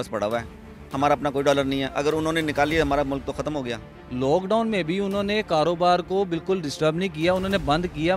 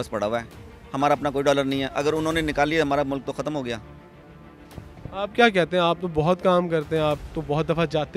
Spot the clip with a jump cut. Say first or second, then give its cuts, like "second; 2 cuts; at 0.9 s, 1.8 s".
first; 1 cut; at 4.0 s